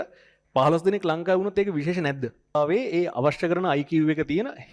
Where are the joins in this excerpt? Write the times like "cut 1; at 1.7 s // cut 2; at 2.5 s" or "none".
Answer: cut 1; at 2.5 s